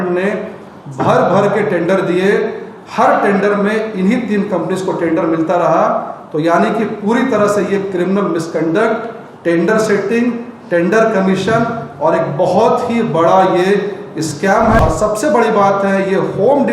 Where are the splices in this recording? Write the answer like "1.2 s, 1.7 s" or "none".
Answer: 14.8 s